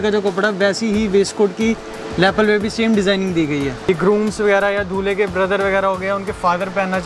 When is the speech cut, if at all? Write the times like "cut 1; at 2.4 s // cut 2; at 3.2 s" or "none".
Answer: cut 1; at 3.8 s